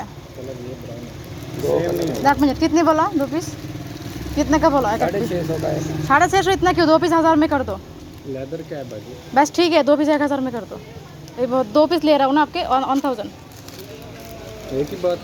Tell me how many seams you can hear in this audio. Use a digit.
0